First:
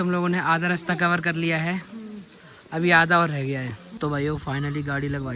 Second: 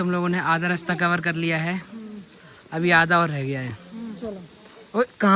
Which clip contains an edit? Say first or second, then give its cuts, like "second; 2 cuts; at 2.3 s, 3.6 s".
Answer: first; 1 cut; at 3.8 s